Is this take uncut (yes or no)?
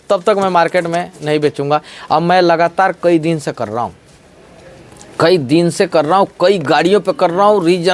yes